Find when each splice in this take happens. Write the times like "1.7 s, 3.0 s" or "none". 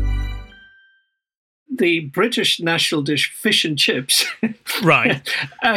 1.5 s